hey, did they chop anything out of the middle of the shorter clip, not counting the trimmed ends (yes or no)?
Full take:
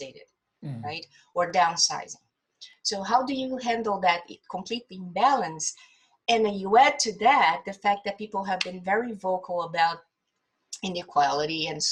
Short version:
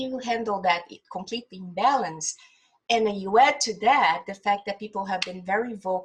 no